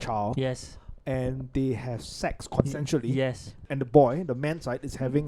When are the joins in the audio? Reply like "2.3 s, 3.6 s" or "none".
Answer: 3.7 s